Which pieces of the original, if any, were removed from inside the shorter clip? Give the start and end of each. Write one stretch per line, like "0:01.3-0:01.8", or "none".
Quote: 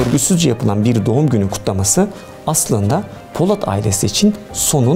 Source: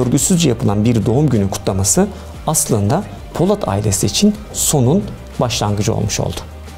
none